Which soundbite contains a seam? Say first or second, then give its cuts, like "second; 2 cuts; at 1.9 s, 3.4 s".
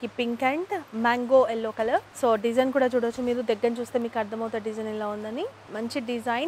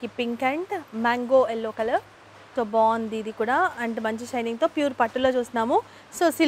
second; 1 cut; at 2.1 s